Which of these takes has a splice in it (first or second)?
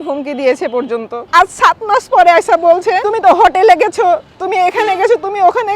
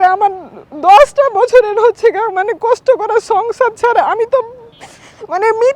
first